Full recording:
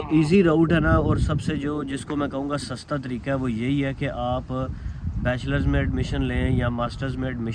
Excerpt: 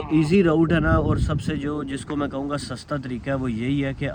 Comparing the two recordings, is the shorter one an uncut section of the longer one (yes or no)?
yes